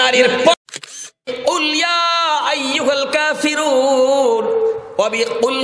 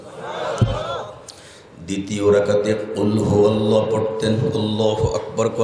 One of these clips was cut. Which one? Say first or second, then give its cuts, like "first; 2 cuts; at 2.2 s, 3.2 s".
first; 1 cut; at 1.3 s